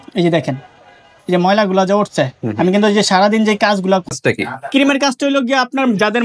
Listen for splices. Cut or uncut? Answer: cut